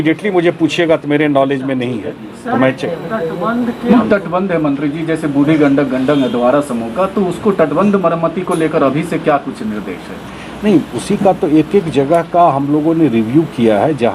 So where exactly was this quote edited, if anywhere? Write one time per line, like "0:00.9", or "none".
0:03.9